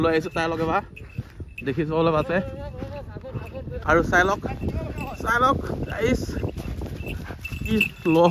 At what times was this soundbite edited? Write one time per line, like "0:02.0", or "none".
0:03.8